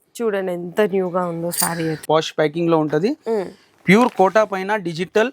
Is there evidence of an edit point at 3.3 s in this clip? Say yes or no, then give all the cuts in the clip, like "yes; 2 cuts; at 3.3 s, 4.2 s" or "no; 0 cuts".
no; 1 cut; at 2.0 s